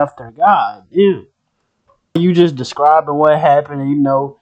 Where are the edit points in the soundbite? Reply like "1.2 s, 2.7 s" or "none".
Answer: 2.2 s

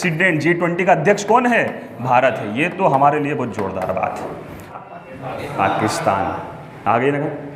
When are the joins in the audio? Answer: 4.6 s

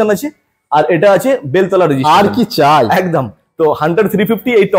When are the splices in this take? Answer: none

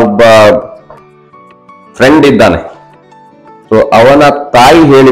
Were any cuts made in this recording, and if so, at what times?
none

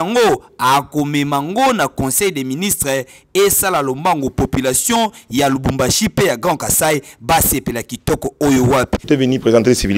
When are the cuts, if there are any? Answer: 9.1 s

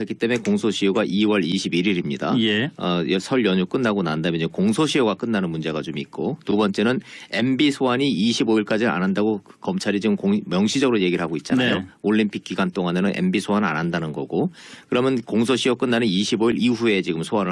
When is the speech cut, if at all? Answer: 10.7 s

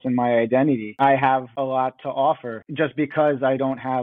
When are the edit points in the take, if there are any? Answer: 2.6 s

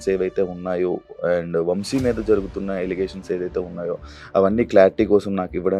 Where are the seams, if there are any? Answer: none

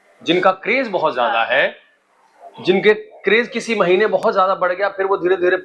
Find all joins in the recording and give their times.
none

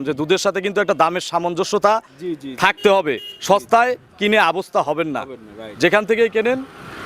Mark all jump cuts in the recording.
none

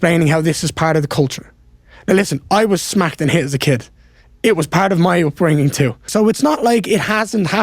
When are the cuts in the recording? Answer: 6.1 s

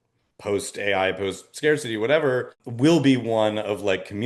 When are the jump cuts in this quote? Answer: 2.6 s

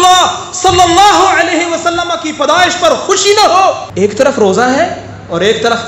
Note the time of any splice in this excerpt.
3.9 s

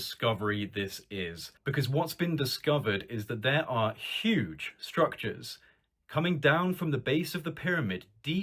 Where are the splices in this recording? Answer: 1.5 s

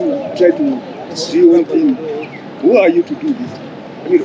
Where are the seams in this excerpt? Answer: none

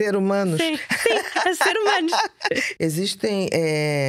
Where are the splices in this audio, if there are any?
2.7 s

